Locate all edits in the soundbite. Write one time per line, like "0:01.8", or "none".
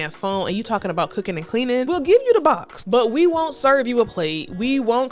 0:01.9
0:02.7